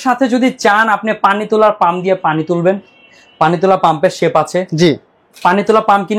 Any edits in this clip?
no; 0 cuts

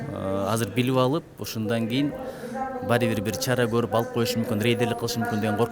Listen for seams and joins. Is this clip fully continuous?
yes; 0 cuts

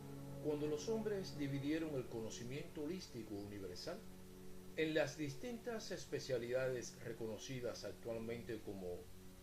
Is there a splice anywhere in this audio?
yes; 1 cut; at 2.3 s

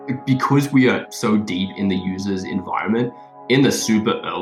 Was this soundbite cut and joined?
no; 0 cuts

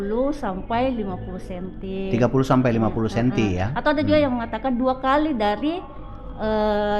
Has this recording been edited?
no; 0 cuts

